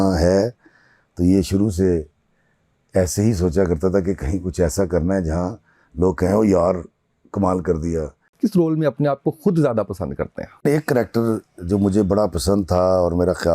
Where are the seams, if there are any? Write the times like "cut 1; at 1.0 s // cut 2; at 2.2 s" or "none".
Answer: cut 1; at 8.2 s // cut 2; at 10.6 s